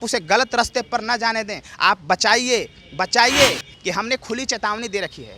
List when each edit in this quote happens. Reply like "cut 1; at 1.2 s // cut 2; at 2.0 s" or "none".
cut 1; at 3.7 s